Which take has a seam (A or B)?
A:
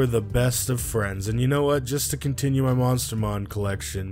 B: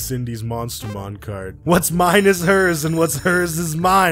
B